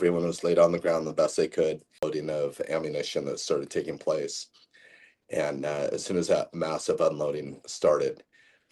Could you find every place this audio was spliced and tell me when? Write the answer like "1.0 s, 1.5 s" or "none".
2.1 s